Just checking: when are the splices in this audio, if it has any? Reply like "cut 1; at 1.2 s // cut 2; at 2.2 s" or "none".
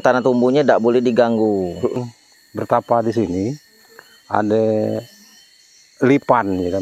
cut 1; at 2.1 s